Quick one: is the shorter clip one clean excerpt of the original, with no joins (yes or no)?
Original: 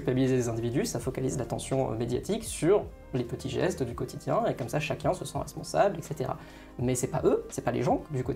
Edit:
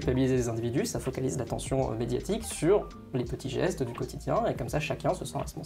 yes